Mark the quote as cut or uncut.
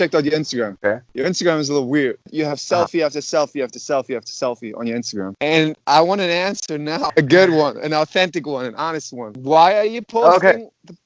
cut